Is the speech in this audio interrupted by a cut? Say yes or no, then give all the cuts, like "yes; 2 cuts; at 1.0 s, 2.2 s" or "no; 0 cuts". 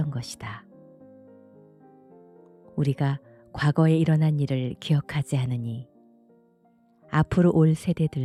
no; 0 cuts